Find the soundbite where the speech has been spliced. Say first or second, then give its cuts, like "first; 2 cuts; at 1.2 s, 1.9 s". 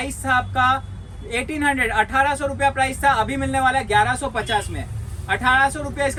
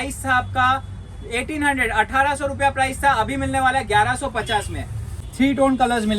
second; 1 cut; at 5.2 s